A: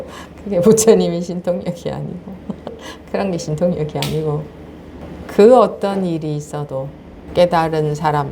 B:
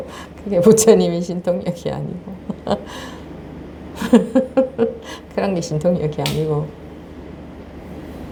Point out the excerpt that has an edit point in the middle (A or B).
A